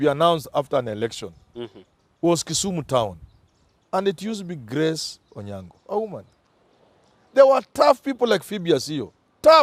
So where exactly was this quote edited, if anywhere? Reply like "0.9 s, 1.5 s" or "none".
none